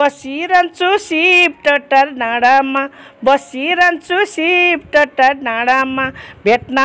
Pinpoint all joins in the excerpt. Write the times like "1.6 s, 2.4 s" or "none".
none